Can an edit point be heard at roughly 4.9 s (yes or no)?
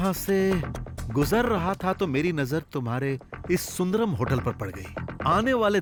no